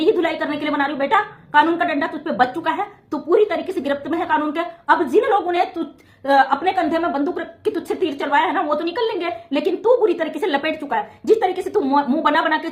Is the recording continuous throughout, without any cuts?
yes; 0 cuts

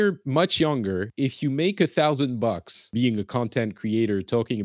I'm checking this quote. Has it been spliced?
yes; 2 cuts; at 1.1 s, 2.9 s

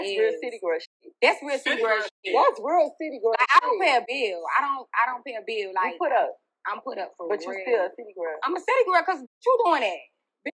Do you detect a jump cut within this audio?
no; 0 cuts

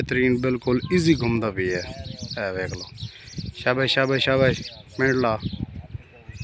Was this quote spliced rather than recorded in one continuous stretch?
no; 0 cuts

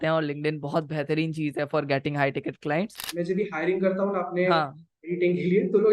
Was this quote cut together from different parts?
yes; 1 cut; at 3.0 s

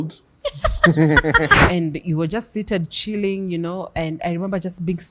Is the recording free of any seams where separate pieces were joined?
no; 1 cut; at 1.6 s

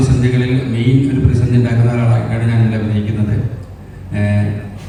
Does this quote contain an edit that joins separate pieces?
no; 0 cuts

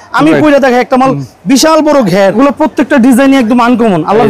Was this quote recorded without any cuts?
no; 1 cut; at 2.4 s

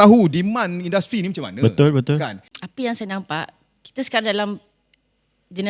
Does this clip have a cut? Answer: yes; 1 cut; at 2.4 s

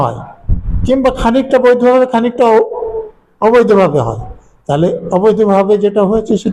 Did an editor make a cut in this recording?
no; 0 cuts

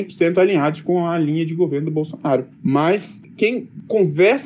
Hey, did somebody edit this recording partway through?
no; 0 cuts

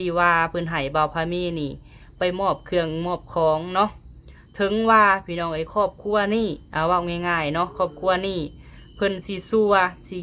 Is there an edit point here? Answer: no; 0 cuts

